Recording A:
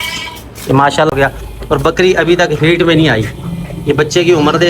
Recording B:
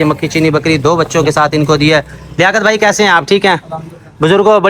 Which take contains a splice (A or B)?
A